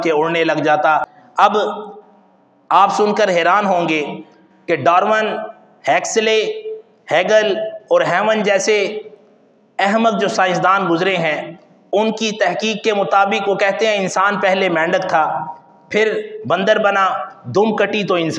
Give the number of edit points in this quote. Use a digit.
1